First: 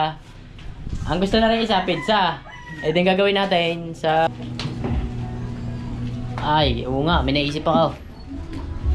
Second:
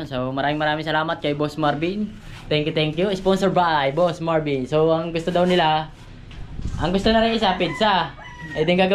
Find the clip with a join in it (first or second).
first